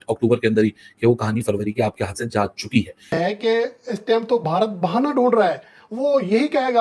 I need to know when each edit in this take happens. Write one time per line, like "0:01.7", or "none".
0:03.1